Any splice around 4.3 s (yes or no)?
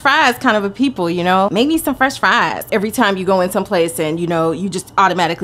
no